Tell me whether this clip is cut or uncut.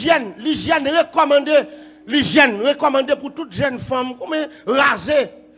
uncut